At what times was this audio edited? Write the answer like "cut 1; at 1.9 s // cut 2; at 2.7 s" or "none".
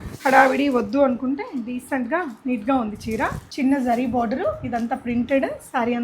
cut 1; at 3.4 s